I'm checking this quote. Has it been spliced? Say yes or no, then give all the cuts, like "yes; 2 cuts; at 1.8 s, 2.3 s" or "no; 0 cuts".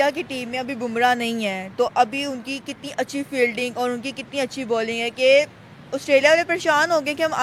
no; 0 cuts